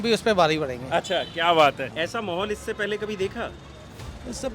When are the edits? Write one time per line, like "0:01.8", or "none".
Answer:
0:01.9